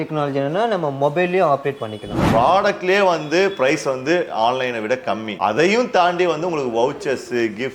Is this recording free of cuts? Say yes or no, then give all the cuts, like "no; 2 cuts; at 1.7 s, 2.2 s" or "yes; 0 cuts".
no; 2 cuts; at 2.2 s, 5.3 s